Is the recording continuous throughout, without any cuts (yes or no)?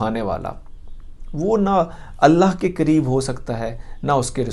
yes